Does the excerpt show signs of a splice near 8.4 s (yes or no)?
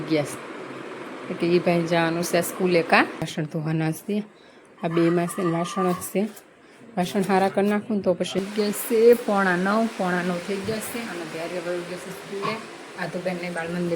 yes